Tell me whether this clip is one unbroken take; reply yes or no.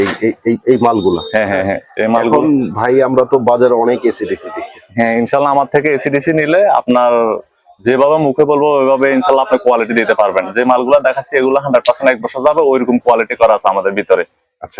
yes